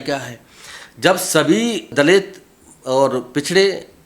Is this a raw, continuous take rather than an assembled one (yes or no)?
no